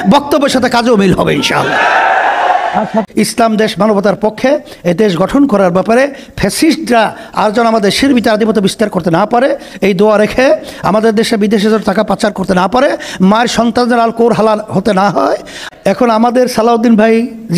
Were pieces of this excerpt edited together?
yes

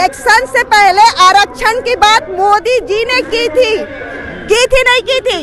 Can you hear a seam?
no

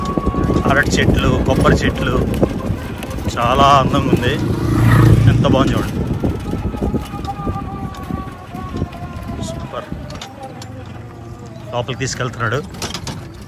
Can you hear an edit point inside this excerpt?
no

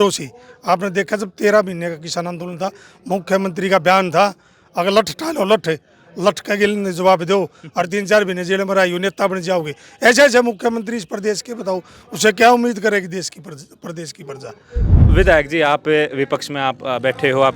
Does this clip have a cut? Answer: yes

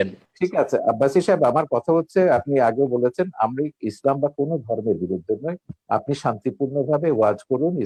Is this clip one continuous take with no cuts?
yes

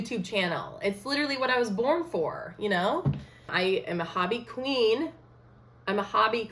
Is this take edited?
yes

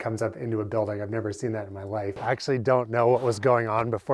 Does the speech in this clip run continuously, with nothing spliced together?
no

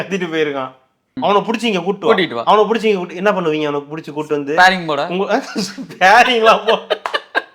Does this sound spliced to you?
yes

